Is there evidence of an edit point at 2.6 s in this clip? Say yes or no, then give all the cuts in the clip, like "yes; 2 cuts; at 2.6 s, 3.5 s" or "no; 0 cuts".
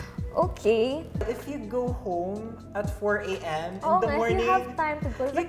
no; 1 cut; at 1.2 s